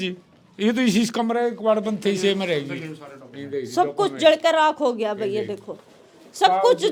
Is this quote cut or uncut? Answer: uncut